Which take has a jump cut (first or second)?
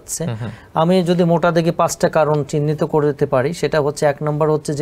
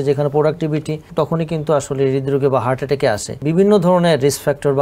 second